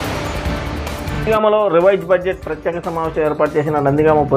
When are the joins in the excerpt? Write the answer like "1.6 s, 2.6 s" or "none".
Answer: 1.1 s